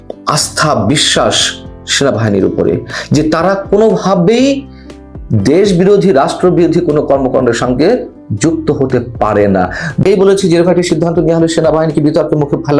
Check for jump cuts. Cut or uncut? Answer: cut